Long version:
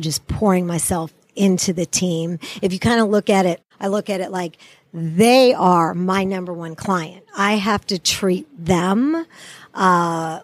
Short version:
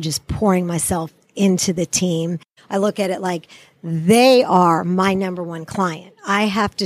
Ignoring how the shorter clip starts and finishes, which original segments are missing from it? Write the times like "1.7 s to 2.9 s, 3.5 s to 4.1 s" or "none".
2.5 s to 3.6 s

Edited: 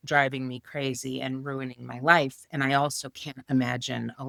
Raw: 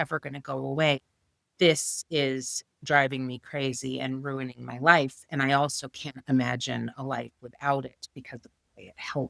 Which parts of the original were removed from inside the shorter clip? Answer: none

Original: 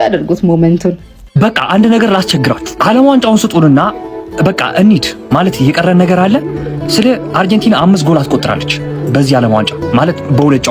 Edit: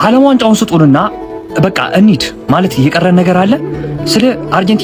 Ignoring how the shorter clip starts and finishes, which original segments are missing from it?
none

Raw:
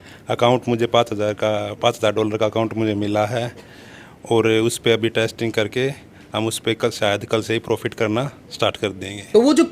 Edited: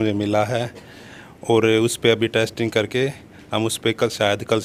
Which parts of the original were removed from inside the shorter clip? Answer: none

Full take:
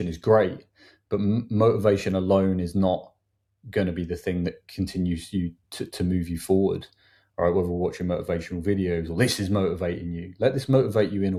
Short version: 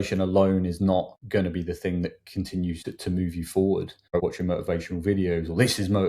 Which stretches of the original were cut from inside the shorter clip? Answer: 3.1 s to 3.6 s, 5.2 s to 5.7 s, 7.1 s to 7.8 s

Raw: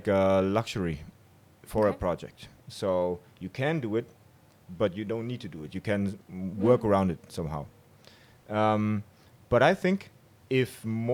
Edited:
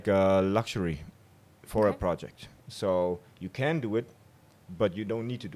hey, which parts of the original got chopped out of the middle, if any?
none

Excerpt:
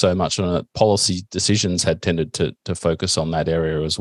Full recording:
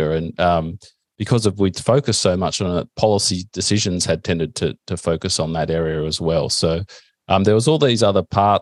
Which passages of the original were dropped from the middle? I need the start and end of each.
none

